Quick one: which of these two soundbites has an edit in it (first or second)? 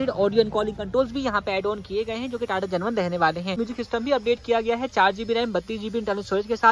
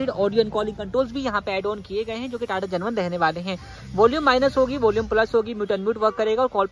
first